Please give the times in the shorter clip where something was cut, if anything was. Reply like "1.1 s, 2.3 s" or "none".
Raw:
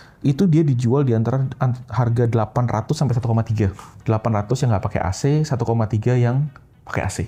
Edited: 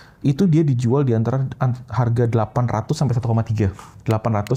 none

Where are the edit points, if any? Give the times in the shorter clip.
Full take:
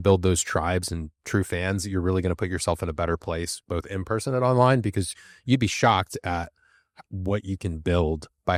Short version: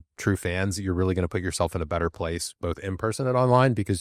none

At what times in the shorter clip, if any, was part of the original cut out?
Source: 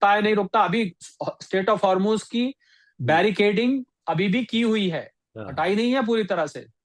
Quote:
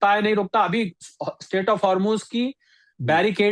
none

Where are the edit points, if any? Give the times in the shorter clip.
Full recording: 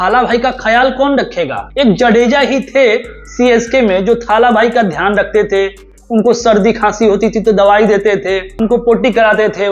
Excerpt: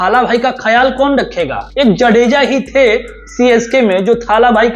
none

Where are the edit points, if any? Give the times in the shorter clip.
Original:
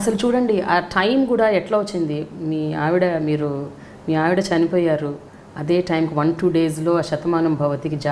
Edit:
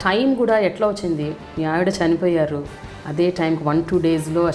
1.4 s

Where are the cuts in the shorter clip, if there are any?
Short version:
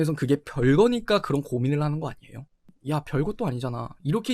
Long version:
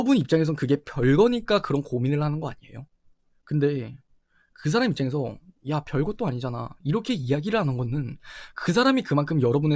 2.7 s

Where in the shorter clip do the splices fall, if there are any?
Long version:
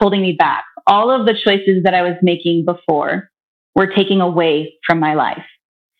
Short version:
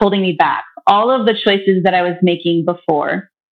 none

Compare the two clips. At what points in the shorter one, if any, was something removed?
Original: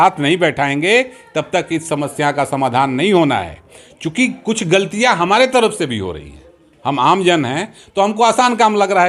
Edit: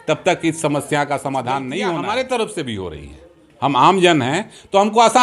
1.9 s

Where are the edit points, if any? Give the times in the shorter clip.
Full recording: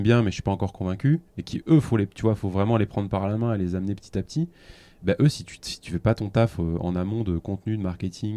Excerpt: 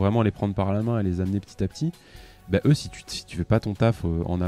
none

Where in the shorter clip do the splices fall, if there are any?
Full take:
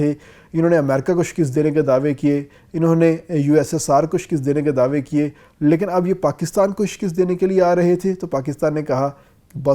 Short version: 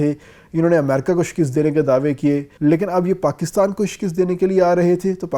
2.5 s

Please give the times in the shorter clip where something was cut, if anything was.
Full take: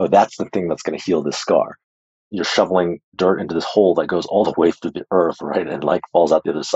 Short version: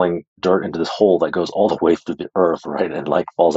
none

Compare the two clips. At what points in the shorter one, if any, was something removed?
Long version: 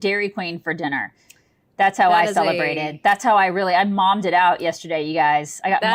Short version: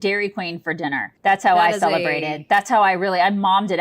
1.1 s

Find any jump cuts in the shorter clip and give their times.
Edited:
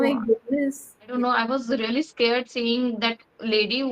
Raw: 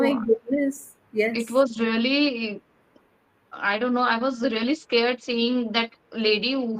1.1 s

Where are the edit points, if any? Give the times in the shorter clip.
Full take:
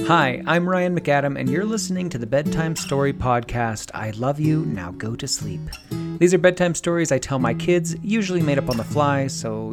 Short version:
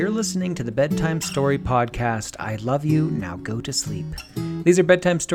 none

